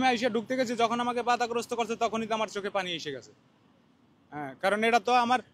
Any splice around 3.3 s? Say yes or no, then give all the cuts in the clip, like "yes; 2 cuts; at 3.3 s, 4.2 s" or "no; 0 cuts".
no; 0 cuts